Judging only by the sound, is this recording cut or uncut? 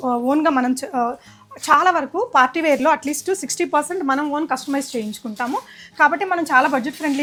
uncut